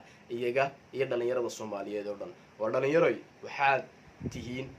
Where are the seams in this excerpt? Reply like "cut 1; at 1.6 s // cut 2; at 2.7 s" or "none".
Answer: cut 1; at 3.3 s

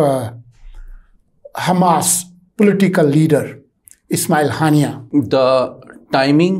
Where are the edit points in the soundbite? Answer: cut 1; at 5.0 s

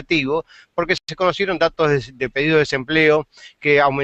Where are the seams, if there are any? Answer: none

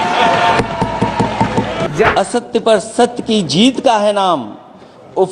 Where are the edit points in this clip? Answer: cut 1; at 2.0 s

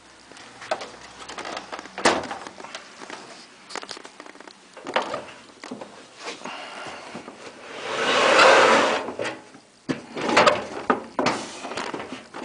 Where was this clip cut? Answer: cut 1; at 8.0 s

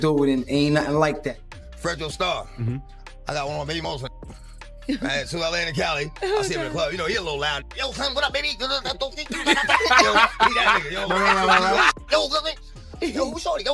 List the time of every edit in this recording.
cut 1; at 1.3 s

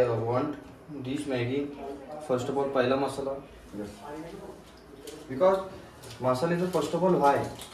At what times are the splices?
none

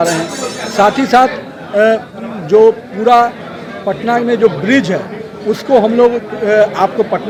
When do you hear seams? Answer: none

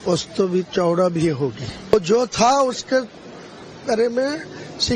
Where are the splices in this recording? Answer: cut 1; at 4.0 s

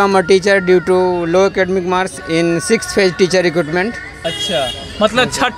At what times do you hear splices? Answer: none

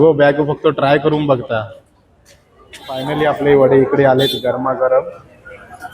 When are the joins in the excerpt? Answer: cut 1; at 3.1 s

